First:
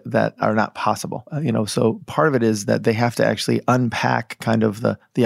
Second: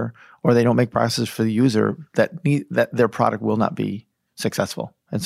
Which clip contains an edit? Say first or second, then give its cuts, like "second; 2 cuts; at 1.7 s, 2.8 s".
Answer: first; 1 cut; at 1.3 s